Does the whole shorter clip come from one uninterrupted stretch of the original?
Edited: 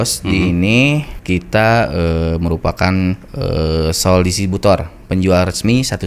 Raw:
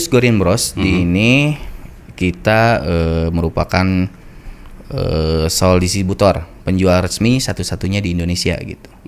no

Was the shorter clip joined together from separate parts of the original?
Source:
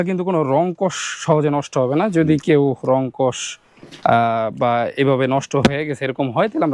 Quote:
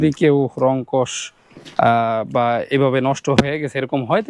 no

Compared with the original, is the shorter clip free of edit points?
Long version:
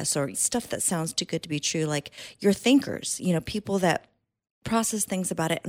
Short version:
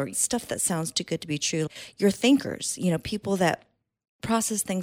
no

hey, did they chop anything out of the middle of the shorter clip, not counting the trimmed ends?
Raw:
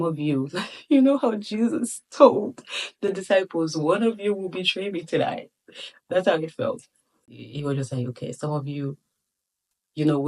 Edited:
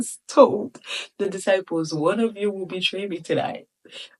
no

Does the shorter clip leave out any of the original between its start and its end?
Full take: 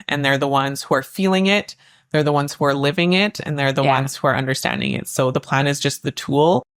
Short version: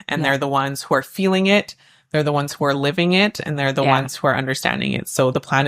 no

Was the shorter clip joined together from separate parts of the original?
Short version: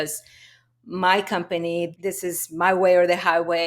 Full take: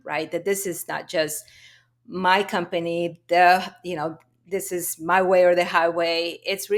yes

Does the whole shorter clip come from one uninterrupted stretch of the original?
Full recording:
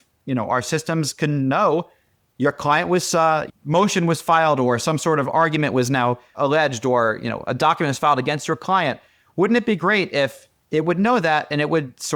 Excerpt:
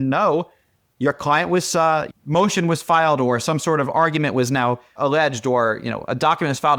yes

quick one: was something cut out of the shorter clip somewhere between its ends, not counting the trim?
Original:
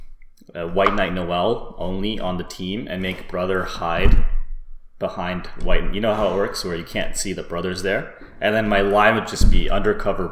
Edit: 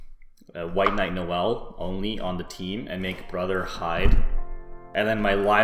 yes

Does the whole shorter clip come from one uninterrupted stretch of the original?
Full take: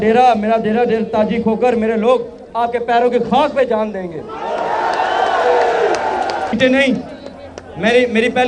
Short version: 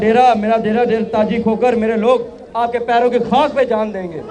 yes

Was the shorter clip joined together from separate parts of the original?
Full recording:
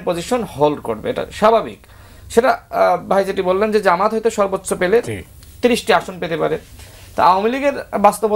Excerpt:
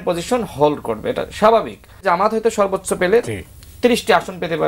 yes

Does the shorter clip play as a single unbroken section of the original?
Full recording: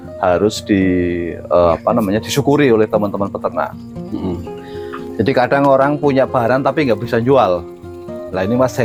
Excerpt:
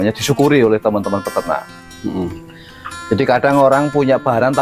yes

